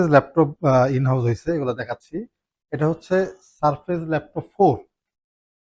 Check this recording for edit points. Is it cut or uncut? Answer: uncut